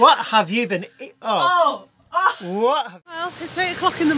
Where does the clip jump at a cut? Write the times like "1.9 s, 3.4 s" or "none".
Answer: 3.0 s